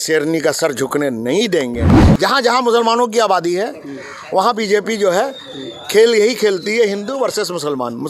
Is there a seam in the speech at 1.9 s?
yes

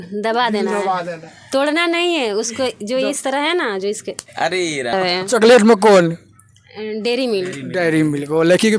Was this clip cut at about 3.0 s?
no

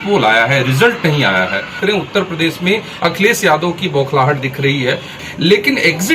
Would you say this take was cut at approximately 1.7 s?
yes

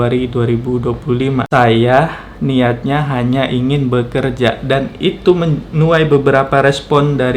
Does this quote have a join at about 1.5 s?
yes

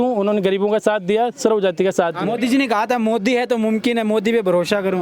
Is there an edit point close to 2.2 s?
yes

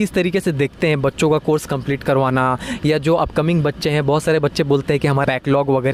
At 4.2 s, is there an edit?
no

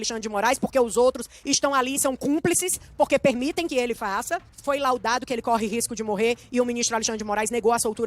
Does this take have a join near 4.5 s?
yes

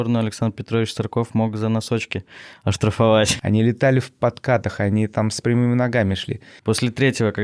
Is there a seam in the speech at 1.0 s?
no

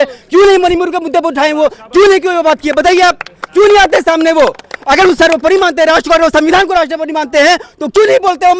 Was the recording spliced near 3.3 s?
yes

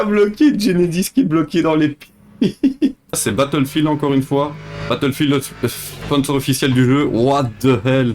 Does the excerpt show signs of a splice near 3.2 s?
yes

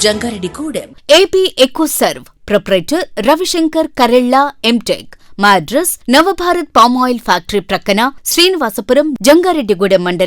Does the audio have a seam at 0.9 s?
yes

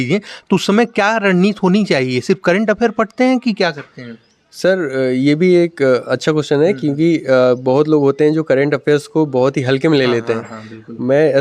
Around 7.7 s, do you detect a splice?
no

